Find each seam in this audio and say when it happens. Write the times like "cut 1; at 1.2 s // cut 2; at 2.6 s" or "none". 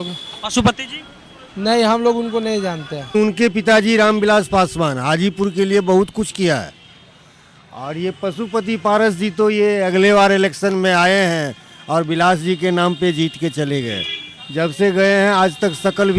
cut 1; at 3.1 s